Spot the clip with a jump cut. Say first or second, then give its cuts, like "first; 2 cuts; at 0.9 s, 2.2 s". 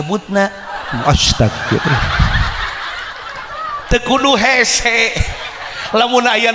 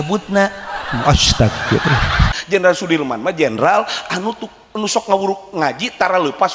second; 1 cut; at 2.4 s